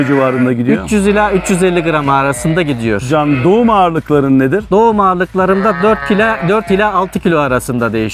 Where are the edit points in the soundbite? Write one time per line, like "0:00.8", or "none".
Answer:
none